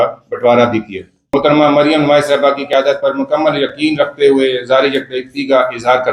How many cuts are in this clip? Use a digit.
1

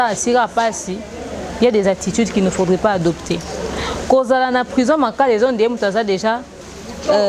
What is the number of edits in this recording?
0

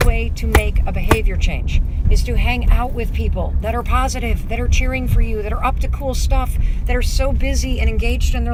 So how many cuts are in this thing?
0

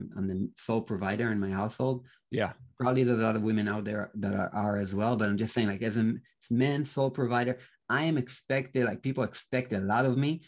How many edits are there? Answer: 0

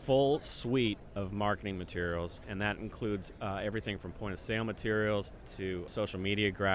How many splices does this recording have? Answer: 2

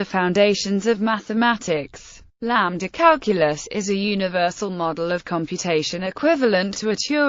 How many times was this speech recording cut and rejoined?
2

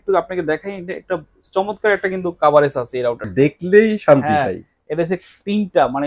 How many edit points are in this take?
1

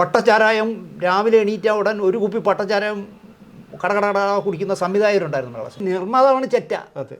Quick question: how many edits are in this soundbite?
1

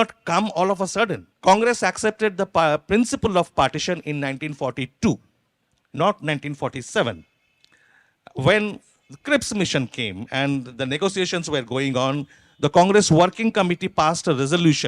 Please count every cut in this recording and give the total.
1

